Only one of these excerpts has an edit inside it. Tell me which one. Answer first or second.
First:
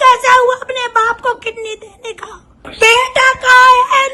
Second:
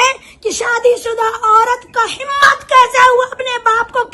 first